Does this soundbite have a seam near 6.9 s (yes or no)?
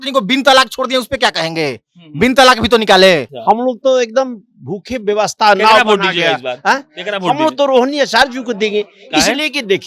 no